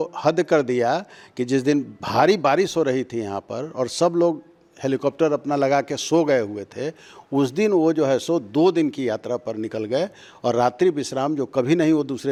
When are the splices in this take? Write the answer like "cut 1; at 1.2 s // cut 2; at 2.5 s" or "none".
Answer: none

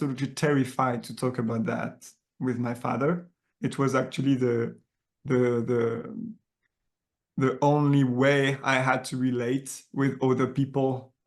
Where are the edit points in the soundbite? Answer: cut 1; at 3.4 s

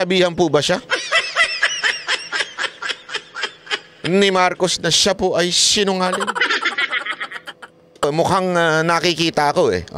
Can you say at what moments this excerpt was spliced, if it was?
cut 1; at 8.0 s

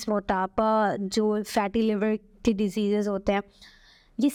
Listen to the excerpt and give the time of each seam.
none

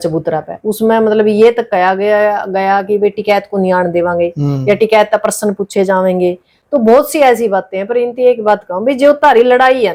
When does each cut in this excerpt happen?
none

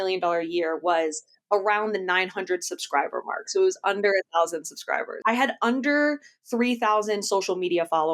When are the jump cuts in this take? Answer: cut 1; at 5.1 s

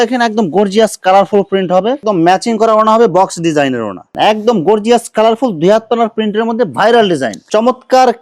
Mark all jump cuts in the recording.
cut 1; at 2.0 s // cut 2; at 4.0 s // cut 3; at 7.4 s

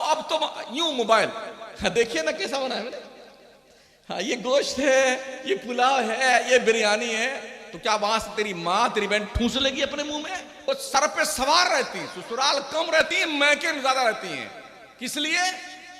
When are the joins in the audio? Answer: cut 1; at 10.6 s

